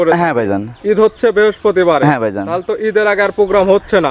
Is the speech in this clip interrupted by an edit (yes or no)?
no